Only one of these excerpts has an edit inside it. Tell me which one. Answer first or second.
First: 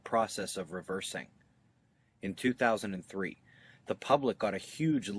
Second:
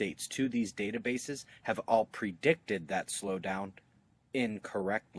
first